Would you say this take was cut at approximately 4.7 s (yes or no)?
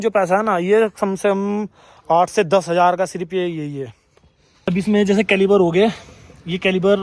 yes